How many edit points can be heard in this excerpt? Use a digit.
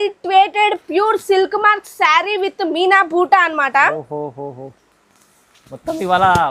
0